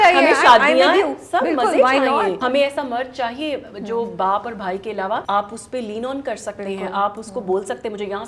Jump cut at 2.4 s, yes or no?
yes